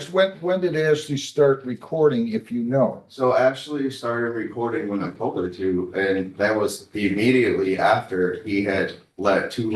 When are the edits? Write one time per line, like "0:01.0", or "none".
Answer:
none